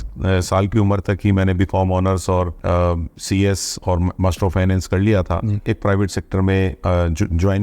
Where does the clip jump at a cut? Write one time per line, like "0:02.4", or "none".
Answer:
0:02.6
0:05.6